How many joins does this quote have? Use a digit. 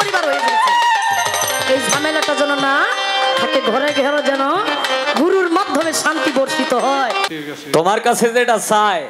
1